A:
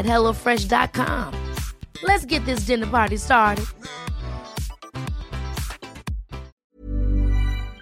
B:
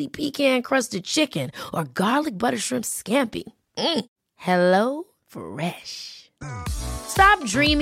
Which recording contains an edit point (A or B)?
A